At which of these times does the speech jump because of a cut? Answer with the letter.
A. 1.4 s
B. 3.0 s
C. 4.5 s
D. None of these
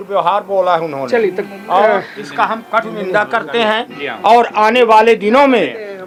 D